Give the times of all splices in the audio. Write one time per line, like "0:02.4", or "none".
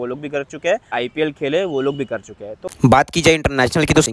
0:00.9
0:02.7